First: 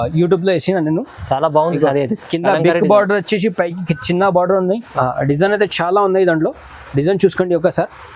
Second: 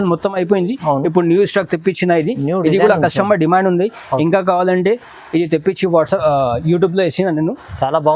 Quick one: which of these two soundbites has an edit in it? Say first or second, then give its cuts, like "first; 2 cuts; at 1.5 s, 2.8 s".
first; 1 cut; at 4.9 s